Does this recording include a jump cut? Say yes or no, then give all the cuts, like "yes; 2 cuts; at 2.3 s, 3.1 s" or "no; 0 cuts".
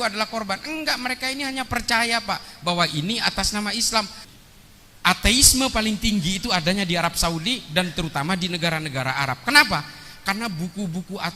yes; 1 cut; at 4.2 s